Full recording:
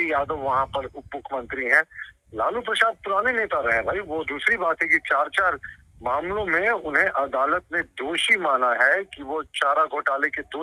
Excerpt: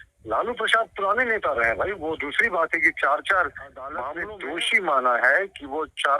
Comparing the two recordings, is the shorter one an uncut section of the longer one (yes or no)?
no